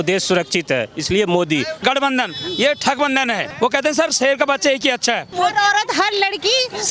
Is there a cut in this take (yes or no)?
yes